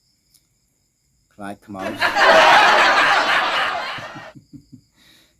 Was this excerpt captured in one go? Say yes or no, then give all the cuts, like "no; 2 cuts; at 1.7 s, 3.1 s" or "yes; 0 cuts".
no; 2 cuts; at 1.9 s, 4.4 s